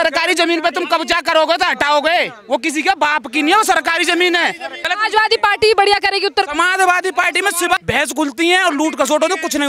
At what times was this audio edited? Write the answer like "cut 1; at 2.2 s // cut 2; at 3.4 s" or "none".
cut 1; at 4.7 s // cut 2; at 7.8 s